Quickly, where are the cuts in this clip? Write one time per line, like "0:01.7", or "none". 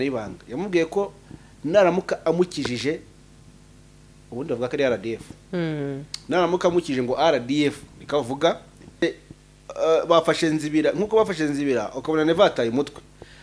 0:09.0

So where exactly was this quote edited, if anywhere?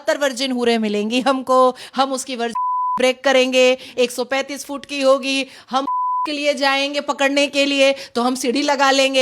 none

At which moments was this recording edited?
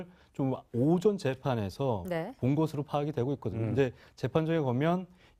none

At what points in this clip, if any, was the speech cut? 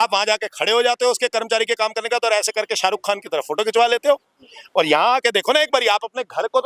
none

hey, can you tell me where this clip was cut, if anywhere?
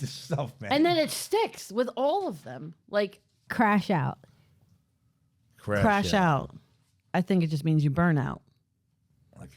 0:03.4

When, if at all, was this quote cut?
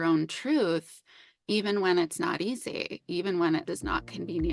0:03.7

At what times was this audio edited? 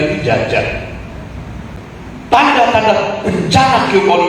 0:01.8

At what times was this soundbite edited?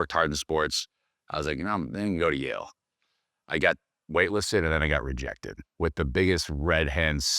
0:05.6

